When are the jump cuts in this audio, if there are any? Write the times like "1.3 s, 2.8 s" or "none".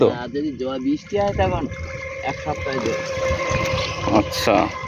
none

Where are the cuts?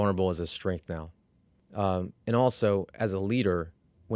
none

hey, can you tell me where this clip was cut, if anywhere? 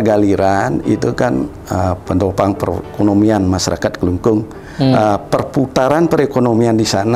none

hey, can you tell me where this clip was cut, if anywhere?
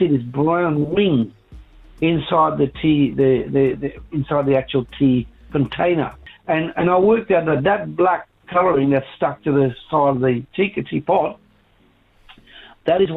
6.2 s

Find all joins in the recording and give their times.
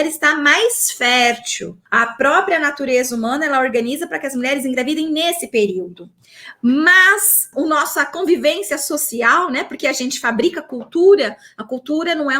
1.8 s, 7.5 s

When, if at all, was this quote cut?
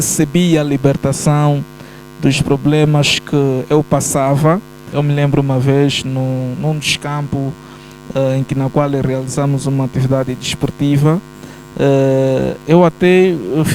4.8 s

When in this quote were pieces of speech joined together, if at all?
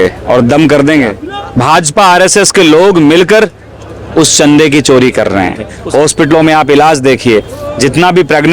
1.2 s, 5.7 s

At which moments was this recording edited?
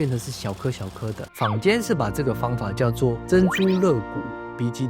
1.2 s

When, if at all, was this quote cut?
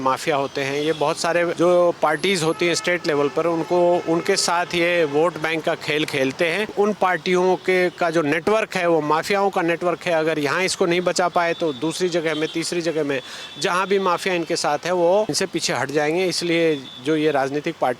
1.5 s, 6.7 s, 15.3 s

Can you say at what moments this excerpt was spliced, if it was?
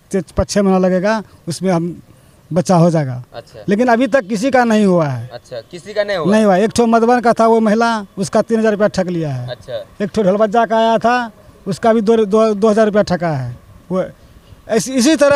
none

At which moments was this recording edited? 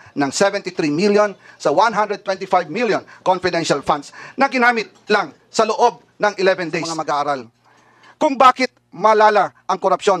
6.9 s

